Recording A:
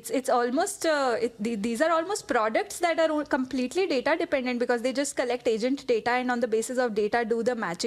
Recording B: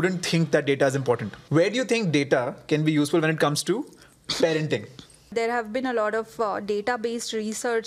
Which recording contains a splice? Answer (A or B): B